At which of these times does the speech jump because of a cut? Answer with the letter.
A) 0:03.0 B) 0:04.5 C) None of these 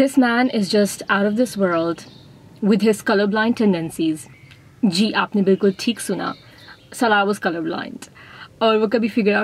C